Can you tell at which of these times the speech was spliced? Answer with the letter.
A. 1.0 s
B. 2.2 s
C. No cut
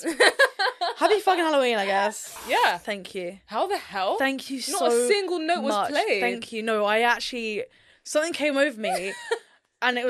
B